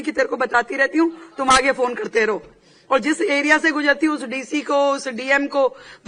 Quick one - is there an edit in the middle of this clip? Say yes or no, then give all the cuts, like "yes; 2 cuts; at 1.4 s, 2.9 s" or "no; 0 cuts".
no; 0 cuts